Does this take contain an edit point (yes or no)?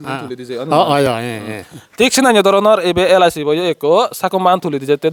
no